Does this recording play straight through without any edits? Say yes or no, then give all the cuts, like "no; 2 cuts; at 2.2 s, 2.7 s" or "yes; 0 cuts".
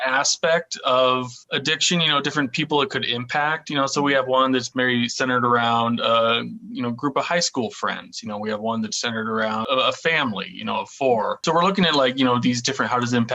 no; 3 cuts; at 1.4 s, 9.6 s, 11.4 s